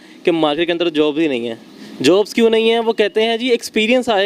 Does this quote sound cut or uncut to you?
uncut